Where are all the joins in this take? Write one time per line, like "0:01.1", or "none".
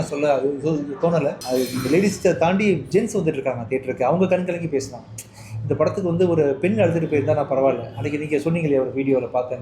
0:01.4